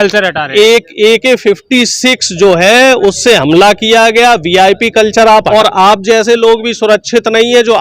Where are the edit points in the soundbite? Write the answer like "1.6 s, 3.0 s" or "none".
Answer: 5.5 s